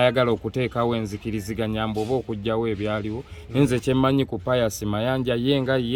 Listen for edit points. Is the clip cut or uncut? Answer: uncut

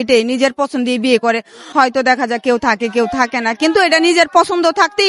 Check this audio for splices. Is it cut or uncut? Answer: cut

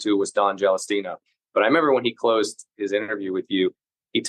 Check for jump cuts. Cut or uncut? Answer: cut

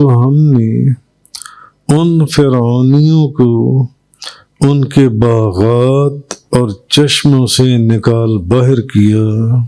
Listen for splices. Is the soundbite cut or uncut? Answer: uncut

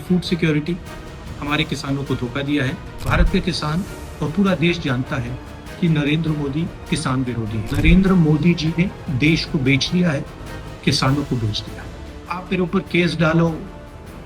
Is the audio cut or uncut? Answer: cut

